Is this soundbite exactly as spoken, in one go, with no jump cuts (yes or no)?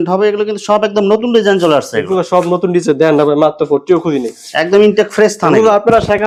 yes